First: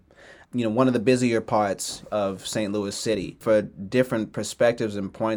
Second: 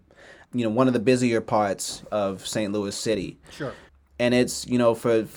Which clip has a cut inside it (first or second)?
first